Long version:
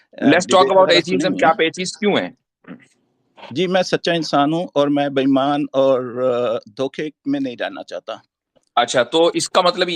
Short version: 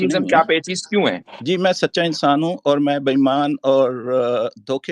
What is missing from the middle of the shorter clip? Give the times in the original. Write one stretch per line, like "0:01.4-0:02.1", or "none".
0:02.4-0:03.4